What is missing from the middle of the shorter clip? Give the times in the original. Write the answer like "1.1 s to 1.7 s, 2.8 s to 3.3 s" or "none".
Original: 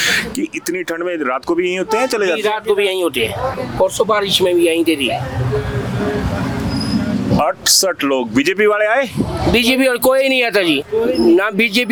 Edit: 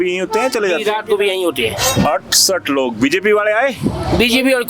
3.5 s to 7.3 s